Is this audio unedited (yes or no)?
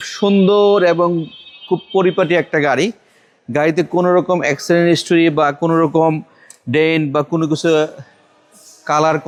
yes